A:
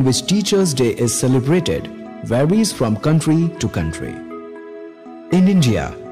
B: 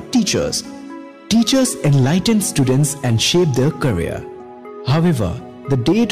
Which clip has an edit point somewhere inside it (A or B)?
A